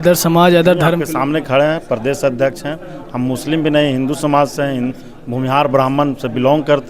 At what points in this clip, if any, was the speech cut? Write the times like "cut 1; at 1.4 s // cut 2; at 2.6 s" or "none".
none

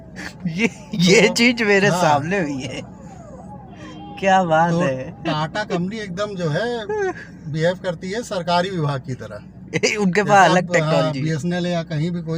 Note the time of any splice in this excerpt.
none

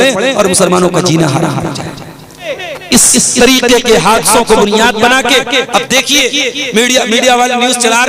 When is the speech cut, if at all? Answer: cut 1; at 2.5 s

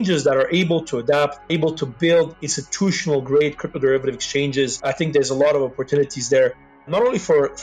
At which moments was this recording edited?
cut 1; at 1.5 s // cut 2; at 4.8 s

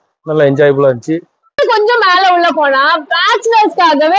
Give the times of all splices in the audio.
cut 1; at 1.6 s

